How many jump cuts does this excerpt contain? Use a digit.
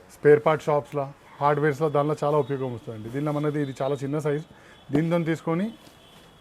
0